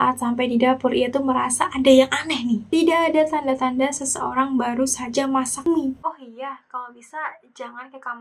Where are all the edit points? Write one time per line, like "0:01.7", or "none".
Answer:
0:02.6
0:06.0